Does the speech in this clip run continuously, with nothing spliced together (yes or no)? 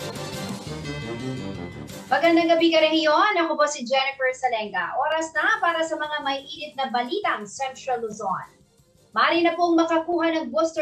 no